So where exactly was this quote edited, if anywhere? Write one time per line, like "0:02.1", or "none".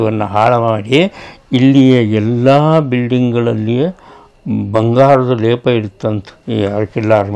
0:06.3